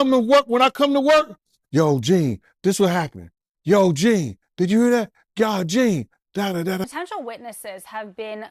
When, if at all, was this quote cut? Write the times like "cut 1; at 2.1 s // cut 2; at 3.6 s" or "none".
cut 1; at 6.8 s